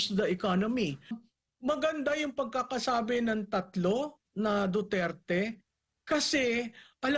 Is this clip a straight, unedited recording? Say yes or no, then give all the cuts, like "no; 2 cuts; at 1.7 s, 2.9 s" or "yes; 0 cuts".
no; 1 cut; at 1.2 s